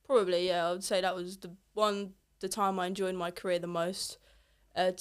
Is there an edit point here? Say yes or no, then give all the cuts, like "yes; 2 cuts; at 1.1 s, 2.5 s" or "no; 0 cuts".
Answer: no; 0 cuts